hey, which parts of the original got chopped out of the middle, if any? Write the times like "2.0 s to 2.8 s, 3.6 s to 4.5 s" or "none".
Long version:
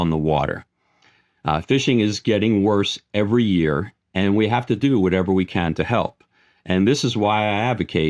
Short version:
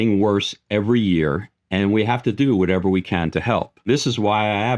6.3 s to 6.9 s